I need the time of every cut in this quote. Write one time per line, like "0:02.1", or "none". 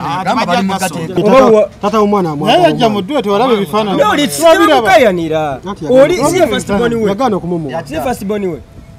0:01.1